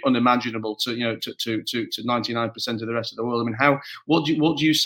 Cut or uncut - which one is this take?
uncut